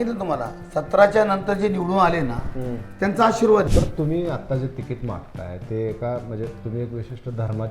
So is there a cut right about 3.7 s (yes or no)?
yes